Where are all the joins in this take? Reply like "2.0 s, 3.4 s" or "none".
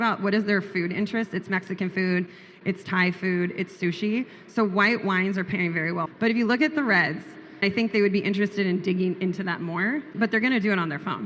6.1 s, 7.6 s